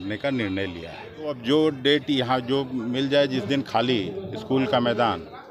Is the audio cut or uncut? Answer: cut